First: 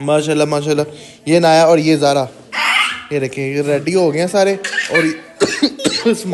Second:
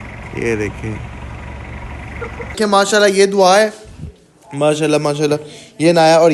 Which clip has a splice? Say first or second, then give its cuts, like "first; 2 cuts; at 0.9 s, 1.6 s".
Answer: second; 1 cut; at 2.6 s